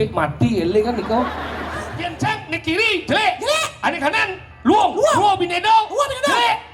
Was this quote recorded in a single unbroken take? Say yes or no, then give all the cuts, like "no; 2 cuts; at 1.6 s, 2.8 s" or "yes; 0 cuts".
no; 1 cut; at 2.0 s